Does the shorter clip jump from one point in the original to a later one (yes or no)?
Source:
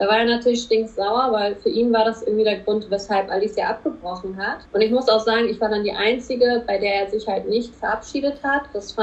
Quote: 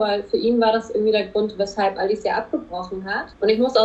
no